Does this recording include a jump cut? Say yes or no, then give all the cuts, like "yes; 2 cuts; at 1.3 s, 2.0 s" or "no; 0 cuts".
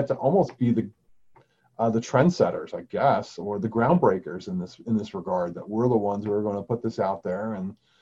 no; 0 cuts